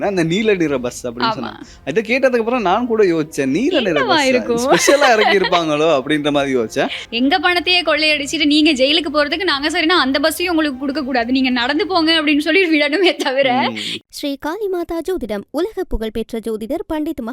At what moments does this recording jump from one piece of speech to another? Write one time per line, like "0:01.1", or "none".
0:07.0
0:13.9